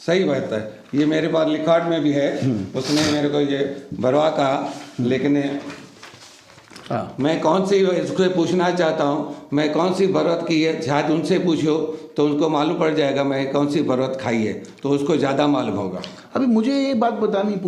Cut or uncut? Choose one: uncut